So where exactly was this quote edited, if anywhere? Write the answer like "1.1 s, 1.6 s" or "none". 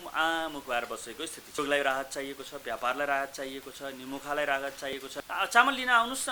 1.6 s, 4.9 s